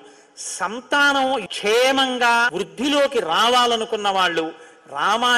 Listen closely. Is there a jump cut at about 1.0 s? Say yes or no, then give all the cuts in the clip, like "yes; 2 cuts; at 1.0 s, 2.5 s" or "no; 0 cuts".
no; 1 cut; at 2.6 s